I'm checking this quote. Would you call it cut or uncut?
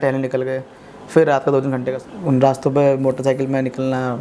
cut